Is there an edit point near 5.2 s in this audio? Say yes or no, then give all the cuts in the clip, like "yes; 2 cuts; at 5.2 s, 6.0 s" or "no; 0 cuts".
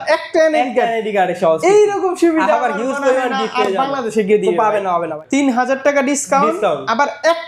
yes; 1 cut; at 5.2 s